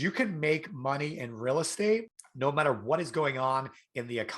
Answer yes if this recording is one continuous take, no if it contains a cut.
no